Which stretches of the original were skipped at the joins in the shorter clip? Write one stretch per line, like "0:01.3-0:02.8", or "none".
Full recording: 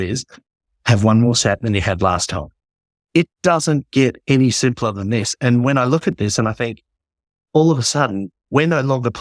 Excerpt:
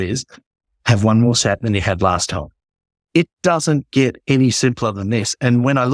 none